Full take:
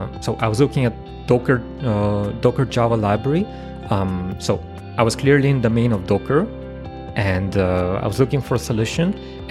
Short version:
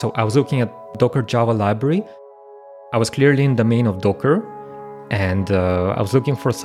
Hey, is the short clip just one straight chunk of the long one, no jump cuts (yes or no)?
no